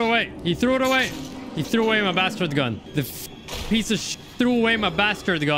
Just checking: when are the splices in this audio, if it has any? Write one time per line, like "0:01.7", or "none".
0:03.4